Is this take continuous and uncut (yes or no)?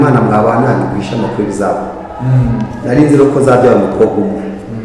yes